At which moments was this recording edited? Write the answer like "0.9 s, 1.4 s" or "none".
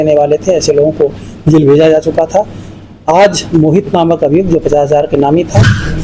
none